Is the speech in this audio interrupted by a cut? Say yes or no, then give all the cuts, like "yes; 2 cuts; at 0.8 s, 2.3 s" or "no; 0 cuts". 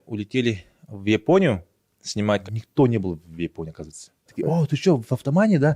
yes; 2 cuts; at 2.5 s, 4.3 s